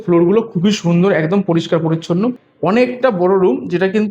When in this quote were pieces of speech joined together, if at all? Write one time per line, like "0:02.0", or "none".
0:02.4